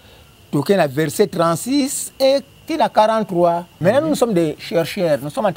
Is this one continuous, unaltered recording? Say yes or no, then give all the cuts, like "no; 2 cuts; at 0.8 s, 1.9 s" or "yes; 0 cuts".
no; 1 cut; at 3.7 s